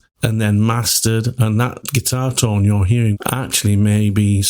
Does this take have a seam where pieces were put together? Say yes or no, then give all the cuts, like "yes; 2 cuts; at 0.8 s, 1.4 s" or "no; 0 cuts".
yes; 2 cuts; at 1.8 s, 3.2 s